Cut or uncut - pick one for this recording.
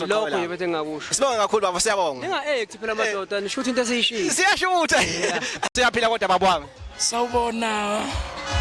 uncut